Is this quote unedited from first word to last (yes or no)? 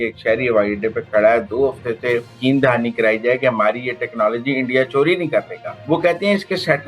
no